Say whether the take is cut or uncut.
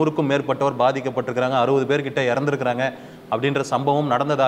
uncut